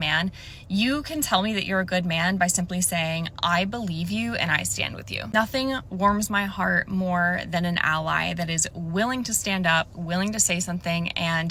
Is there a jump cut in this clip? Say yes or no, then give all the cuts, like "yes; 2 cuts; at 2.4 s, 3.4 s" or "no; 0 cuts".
no; 0 cuts